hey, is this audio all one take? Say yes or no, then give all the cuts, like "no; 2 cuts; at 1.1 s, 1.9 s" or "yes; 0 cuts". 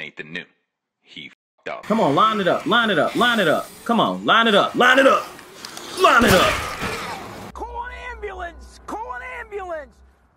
no; 2 cuts; at 1.4 s, 7.5 s